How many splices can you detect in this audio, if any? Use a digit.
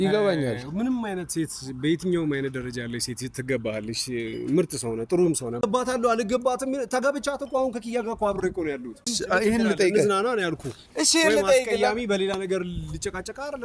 2